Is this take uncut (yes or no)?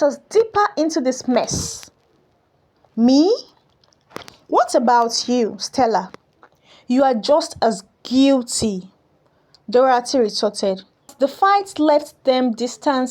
no